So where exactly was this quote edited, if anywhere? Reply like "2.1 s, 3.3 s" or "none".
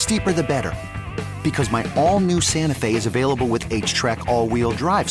none